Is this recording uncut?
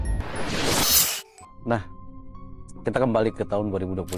no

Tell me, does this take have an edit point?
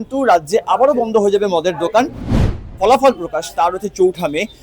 yes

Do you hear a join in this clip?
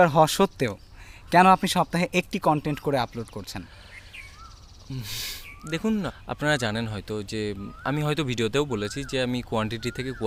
no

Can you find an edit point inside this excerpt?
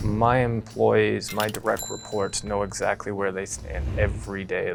no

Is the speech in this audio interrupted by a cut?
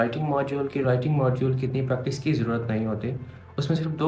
no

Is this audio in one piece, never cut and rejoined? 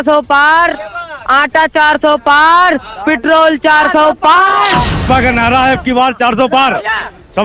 no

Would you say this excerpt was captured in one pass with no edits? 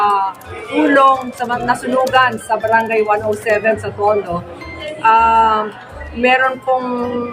yes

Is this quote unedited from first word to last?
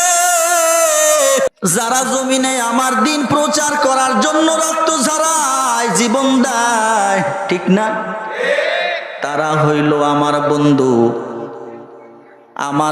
no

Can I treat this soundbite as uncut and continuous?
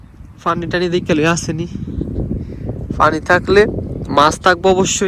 yes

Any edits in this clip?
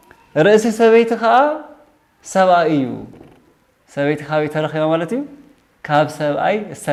no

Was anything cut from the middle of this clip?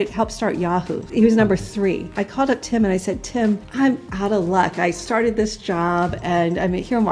yes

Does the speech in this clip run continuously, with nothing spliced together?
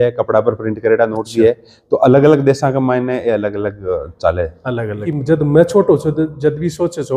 no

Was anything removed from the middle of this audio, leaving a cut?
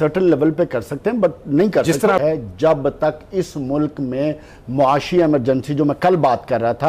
yes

